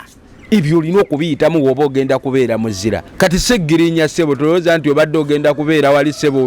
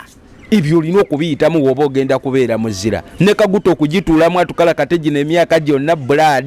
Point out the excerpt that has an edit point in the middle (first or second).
first